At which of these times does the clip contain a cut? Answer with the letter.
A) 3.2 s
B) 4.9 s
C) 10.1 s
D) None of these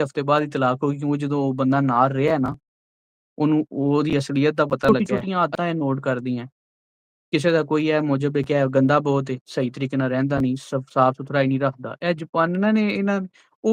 B